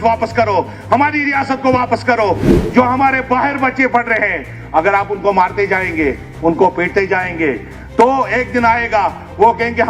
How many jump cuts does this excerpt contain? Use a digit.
1